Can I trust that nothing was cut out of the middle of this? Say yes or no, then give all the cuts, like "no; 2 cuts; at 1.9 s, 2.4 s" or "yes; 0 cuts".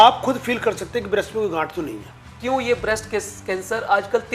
no; 1 cut; at 2.3 s